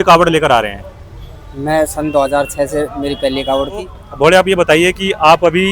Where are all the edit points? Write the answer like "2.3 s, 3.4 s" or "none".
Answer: 4.0 s